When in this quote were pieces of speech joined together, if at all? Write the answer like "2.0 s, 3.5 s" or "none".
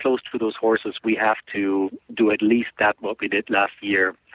none